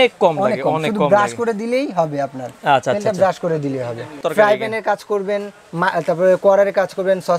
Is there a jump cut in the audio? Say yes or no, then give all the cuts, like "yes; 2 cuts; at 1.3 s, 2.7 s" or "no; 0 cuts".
yes; 1 cut; at 4.2 s